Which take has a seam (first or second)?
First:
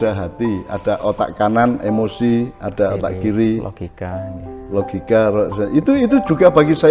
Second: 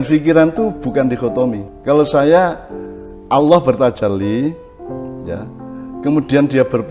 second